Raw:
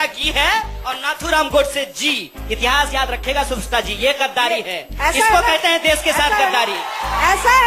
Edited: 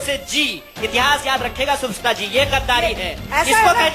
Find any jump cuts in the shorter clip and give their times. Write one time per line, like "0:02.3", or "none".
none